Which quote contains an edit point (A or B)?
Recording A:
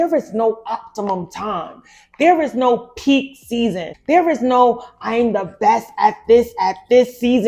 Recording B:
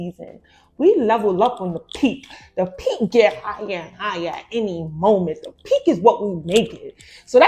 A